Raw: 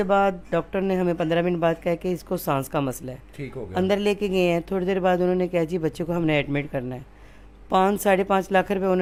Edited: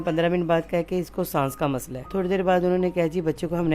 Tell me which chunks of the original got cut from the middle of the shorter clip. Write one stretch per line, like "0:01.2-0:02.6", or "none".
0:03.2-0:04.7